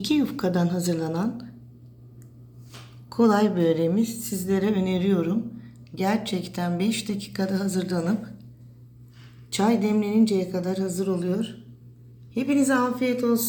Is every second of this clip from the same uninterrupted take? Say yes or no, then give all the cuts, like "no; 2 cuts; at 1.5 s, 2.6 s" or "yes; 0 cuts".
yes; 0 cuts